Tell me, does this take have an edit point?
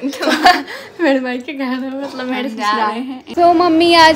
yes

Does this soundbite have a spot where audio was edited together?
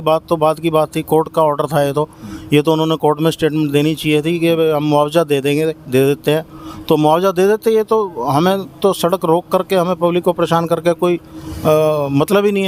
no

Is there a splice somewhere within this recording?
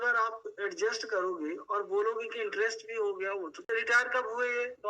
yes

